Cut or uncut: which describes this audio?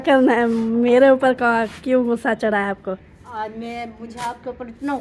uncut